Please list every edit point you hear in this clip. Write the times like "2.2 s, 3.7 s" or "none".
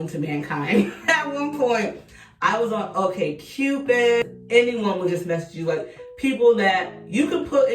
4.3 s